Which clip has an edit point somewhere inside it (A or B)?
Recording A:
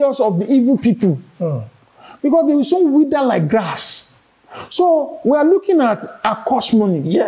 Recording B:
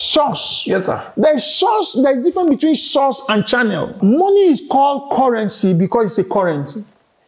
B